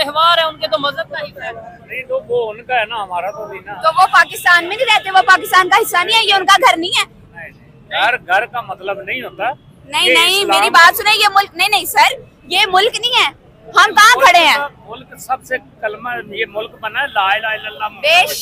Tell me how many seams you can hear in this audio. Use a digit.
0